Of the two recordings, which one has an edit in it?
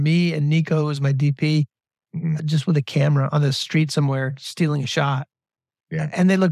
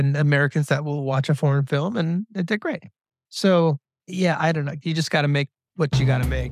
second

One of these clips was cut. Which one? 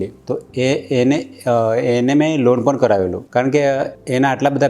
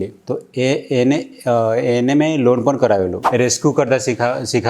second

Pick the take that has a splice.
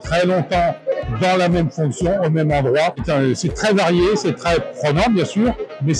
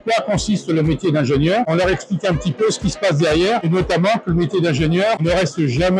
second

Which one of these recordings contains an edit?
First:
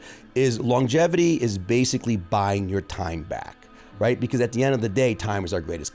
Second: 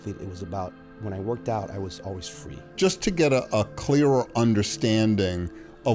second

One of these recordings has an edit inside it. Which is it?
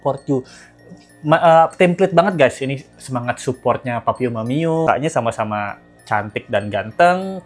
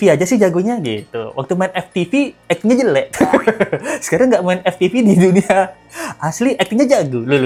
first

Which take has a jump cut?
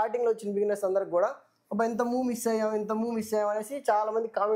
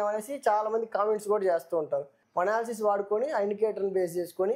second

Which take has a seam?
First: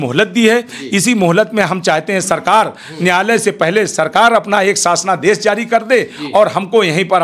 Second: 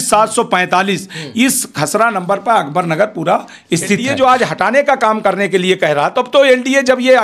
second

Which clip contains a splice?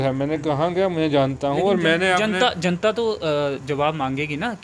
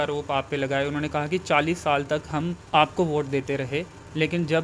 second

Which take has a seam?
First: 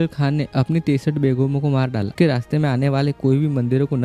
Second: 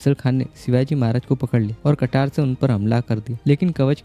first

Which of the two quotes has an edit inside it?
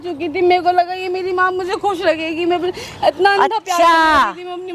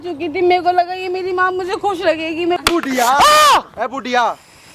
second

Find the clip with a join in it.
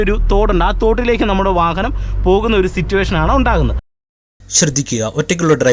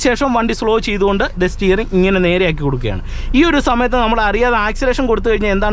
first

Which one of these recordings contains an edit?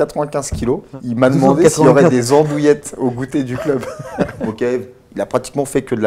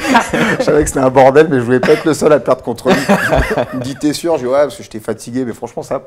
first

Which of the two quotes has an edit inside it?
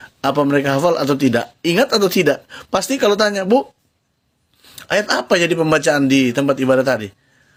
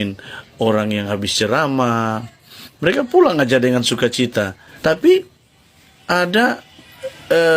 second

